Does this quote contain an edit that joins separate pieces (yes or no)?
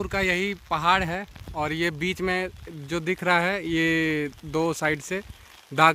no